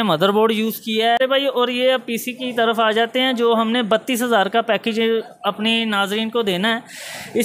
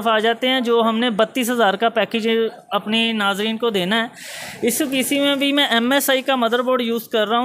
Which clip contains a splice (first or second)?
first